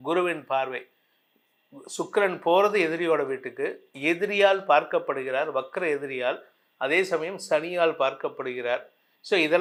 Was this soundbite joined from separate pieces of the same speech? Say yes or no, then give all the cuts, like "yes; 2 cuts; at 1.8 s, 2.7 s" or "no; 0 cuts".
no; 0 cuts